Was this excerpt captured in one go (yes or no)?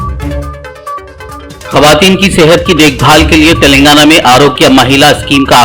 no